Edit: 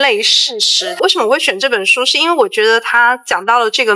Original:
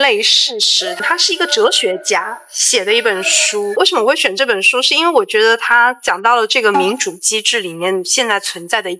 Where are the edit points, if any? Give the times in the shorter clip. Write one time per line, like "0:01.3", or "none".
0:01.0